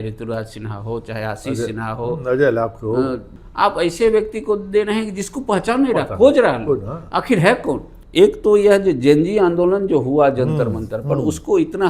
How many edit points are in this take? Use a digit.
2